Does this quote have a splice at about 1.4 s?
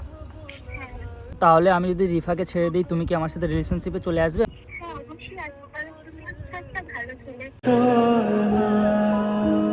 yes; 2 cuts; at 1.4 s, 4.5 s

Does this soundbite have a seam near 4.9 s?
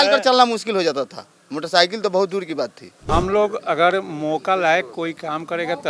no; 1 cut; at 3.0 s

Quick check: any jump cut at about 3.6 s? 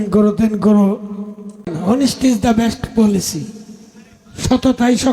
no; 1 cut; at 1.8 s

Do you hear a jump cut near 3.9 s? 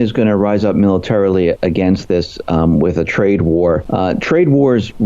yes; 1 cut; at 3.9 s

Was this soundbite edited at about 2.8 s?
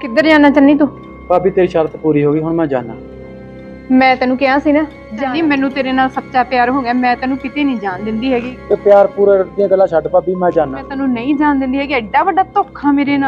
no; 3 cuts; at 5.1 s, 8.5 s, 10.9 s

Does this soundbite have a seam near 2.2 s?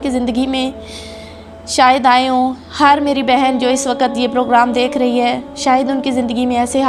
no; 0 cuts

